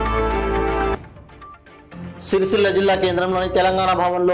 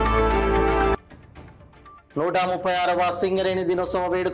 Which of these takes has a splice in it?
first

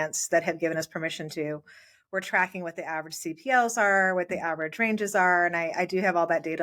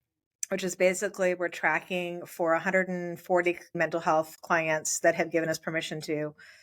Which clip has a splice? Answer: second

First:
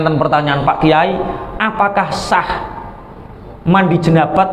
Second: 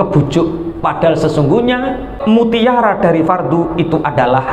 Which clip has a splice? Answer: second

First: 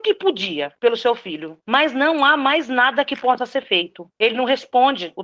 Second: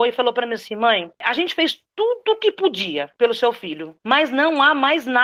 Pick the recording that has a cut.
first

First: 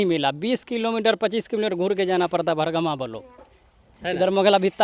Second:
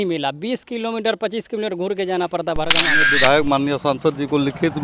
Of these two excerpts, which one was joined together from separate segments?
second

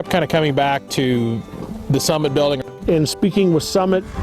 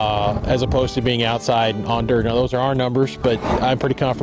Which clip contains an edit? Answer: first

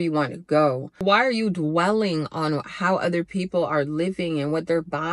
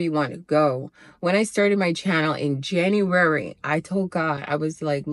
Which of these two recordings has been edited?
first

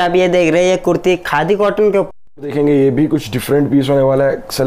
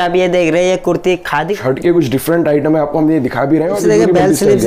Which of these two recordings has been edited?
second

